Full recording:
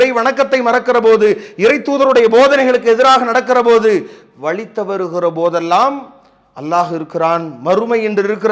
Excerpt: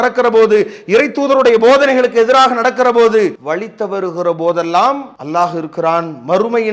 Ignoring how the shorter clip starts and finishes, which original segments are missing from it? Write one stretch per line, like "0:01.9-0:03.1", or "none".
0:04.1-0:04.4
0:06.1-0:06.5